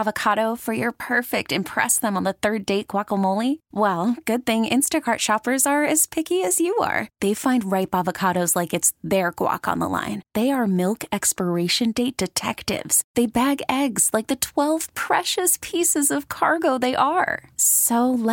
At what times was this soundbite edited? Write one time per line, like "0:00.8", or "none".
none